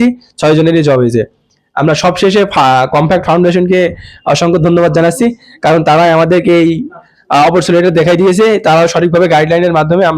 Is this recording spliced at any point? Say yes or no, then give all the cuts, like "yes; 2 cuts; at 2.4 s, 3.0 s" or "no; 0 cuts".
no; 0 cuts